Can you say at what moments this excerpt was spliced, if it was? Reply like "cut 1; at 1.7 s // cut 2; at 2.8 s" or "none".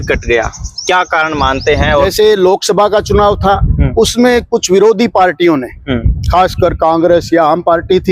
cut 1; at 2.1 s